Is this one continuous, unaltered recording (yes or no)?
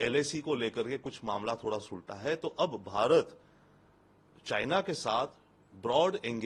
yes